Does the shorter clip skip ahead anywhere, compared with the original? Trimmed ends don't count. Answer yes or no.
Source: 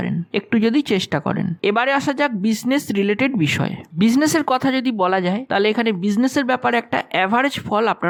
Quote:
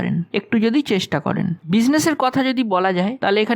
yes